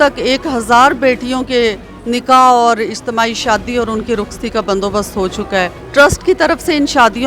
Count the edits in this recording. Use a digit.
1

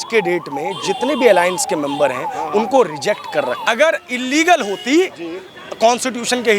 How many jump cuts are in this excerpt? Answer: 1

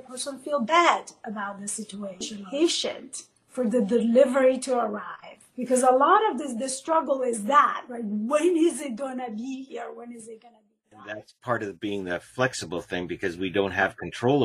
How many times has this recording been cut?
1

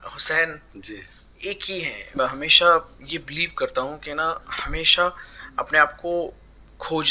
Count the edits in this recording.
1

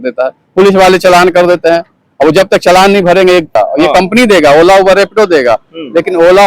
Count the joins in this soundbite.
1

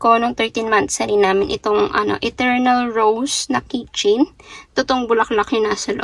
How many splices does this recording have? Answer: 0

